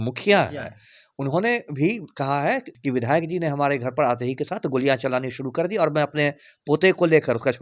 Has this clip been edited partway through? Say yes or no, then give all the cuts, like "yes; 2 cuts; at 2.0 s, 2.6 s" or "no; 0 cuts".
yes; 1 cut; at 2.7 s